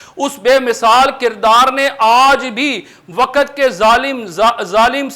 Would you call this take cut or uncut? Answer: uncut